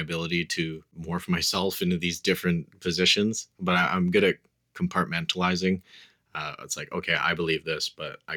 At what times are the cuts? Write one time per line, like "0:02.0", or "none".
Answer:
0:00.9